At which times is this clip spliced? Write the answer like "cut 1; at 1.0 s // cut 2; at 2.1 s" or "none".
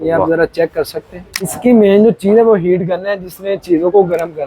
cut 1; at 1.5 s